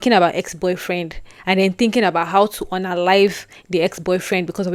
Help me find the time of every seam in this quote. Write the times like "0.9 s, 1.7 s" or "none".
none